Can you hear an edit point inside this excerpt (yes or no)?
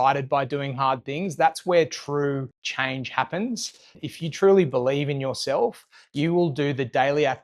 yes